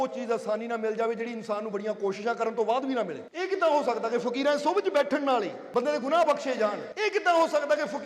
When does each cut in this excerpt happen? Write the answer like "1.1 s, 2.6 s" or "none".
3.2 s, 5.6 s, 6.9 s

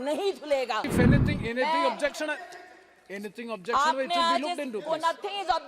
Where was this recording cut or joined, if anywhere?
0.9 s

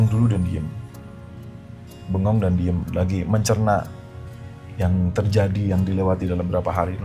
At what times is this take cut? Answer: none

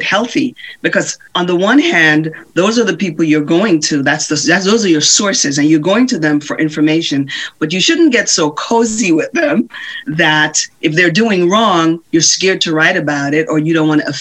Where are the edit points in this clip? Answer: 1.2 s

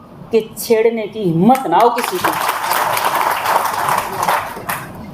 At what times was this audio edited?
none

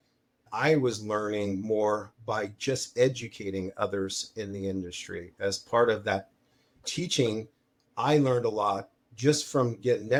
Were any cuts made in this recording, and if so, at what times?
none

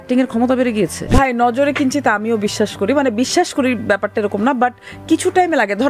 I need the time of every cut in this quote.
1.1 s

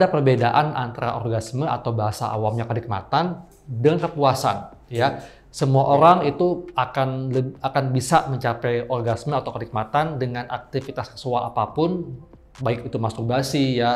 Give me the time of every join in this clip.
none

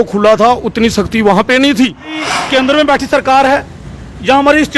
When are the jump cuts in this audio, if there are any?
2.2 s

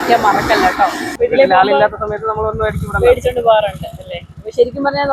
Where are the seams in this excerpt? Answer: 1.1 s

